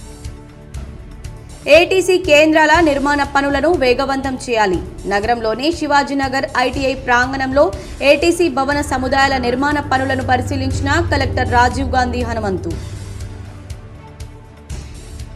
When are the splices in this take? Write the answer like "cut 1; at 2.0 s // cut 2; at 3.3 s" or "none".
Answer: none

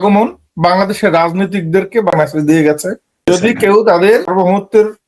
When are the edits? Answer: cut 1; at 2.1 s // cut 2; at 3.3 s // cut 3; at 4.3 s

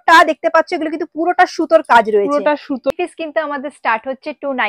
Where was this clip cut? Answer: cut 1; at 2.9 s

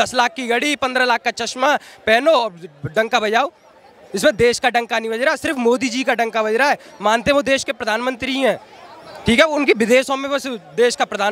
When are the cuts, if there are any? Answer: none

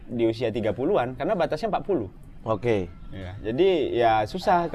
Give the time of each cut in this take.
none

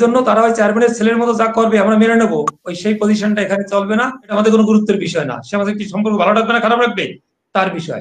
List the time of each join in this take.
cut 1; at 4.3 s

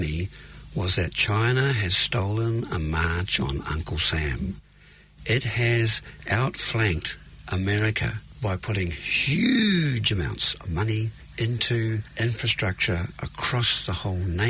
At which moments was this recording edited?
cut 1; at 6.2 s // cut 2; at 8.2 s // cut 3; at 11.2 s // cut 4; at 12.1 s

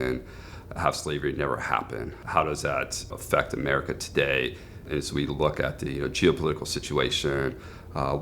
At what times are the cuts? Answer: cut 1; at 2.2 s // cut 2; at 3.1 s // cut 3; at 4.8 s

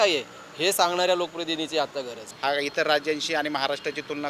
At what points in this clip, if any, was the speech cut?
cut 1; at 2.2 s

